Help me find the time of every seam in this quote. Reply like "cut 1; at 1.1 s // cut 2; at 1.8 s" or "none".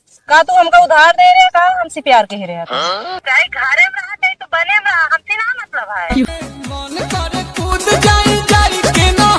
cut 1; at 3.2 s // cut 2; at 6.3 s